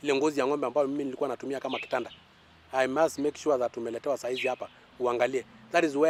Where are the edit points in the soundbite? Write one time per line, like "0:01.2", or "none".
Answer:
none